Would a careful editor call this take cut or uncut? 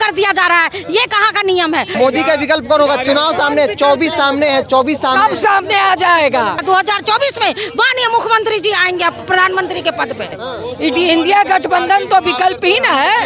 cut